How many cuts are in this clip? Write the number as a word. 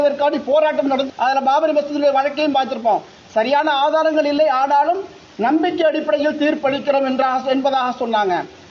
one